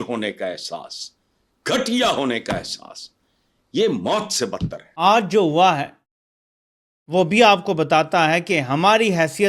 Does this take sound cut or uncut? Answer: cut